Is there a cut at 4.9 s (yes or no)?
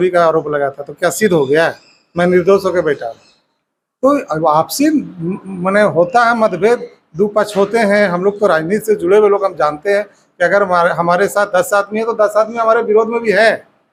no